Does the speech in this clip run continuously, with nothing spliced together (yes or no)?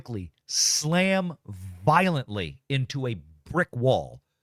yes